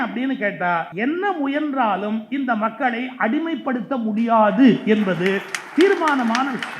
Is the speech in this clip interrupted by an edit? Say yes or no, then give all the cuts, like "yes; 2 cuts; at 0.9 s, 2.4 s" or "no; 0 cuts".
yes; 1 cut; at 0.9 s